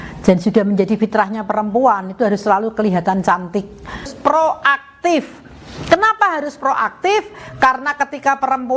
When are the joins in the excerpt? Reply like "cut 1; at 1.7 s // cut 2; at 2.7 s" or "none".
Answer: cut 1; at 4.1 s